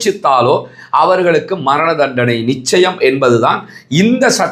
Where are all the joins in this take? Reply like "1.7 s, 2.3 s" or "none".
none